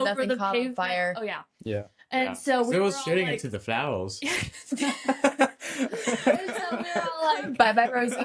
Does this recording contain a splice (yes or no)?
no